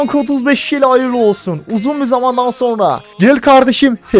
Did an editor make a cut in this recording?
yes; 1 cut; at 3.1 s

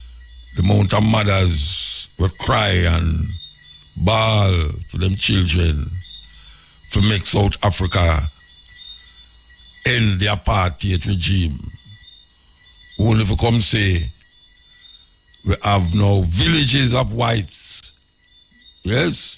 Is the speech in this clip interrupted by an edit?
no; 0 cuts

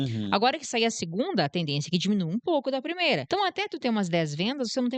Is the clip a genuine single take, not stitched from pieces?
no; 1 cut; at 3.2 s

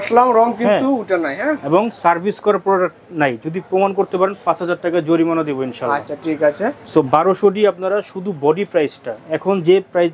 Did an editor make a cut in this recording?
no; 0 cuts

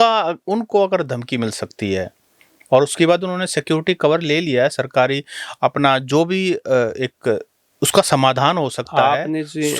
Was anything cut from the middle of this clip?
no; 0 cuts

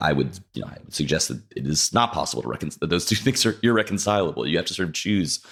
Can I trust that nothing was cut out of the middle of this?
yes; 0 cuts

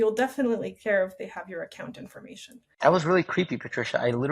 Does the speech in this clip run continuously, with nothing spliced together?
no; 1 cut; at 2.6 s

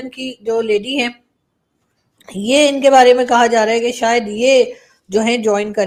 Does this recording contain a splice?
no; 0 cuts

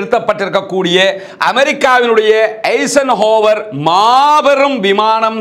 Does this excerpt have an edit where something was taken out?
no; 0 cuts

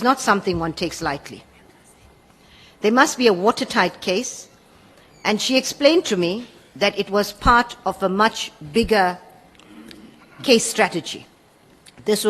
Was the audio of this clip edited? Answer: no; 0 cuts

